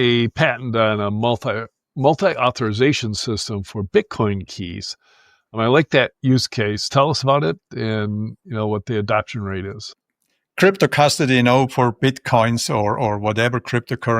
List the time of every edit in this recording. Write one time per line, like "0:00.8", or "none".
0:05.5